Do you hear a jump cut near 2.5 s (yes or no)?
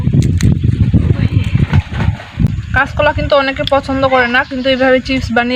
yes